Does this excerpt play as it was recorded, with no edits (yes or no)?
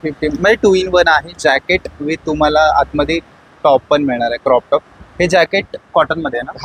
yes